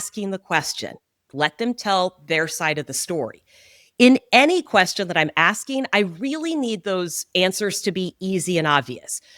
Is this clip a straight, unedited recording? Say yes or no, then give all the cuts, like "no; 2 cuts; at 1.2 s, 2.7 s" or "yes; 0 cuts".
no; 1 cut; at 1.2 s